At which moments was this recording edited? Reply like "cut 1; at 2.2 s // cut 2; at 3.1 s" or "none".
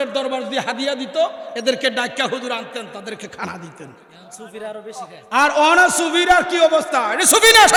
none